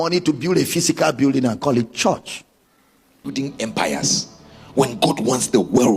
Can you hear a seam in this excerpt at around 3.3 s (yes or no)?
yes